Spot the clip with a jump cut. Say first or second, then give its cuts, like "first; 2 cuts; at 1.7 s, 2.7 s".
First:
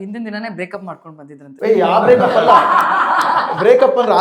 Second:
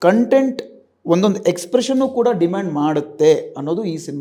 first; 1 cut; at 1.5 s